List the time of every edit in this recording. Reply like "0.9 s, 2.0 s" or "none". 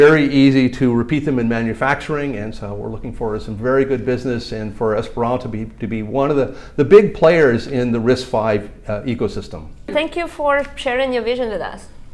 9.9 s